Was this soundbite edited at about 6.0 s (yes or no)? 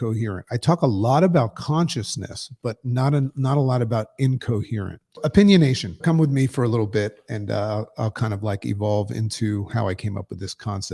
yes